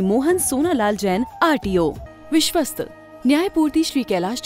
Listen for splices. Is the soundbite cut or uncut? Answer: cut